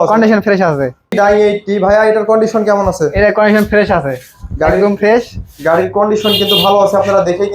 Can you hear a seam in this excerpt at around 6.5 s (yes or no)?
no